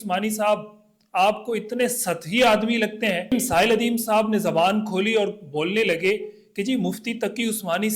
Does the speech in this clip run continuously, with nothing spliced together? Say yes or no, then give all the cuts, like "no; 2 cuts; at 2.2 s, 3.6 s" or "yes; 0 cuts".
no; 1 cut; at 3.3 s